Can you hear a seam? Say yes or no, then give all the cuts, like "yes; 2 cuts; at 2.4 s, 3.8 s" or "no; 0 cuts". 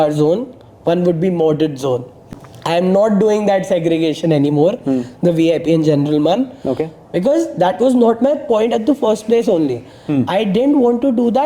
yes; 1 cut; at 2.3 s